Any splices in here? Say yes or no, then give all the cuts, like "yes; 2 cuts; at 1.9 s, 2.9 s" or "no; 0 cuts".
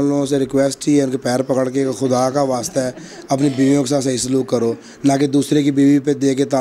no; 0 cuts